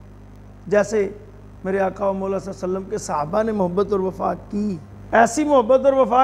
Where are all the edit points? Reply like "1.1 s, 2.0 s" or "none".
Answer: 4.9 s